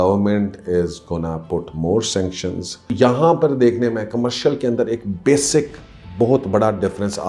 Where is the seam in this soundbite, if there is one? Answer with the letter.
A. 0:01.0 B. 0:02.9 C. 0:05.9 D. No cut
B